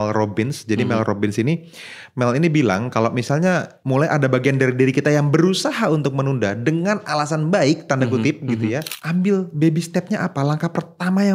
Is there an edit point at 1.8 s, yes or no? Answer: no